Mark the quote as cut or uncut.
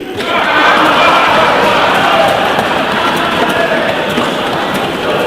uncut